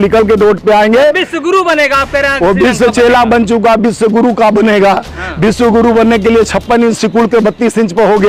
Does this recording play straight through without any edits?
yes; 0 cuts

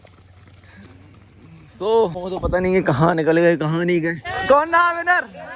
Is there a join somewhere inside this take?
yes; 2 cuts; at 2.2 s, 4.3 s

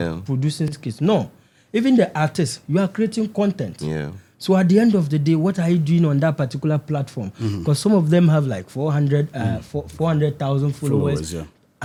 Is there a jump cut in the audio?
no; 0 cuts

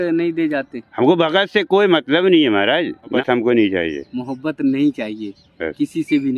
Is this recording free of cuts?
no; 1 cut; at 3.2 s

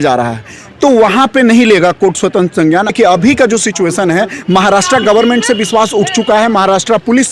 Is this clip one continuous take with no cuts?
no; 1 cut; at 2.9 s

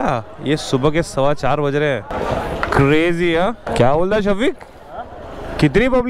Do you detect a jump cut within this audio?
no; 0 cuts

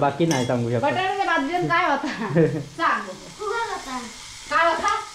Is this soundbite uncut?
yes; 0 cuts

